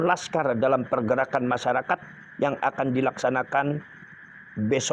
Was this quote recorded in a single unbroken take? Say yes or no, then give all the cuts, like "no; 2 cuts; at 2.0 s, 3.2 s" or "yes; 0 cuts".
yes; 0 cuts